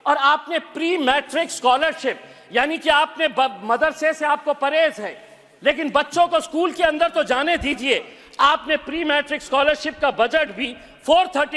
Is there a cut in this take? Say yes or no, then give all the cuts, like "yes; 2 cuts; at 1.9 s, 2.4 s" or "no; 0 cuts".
no; 0 cuts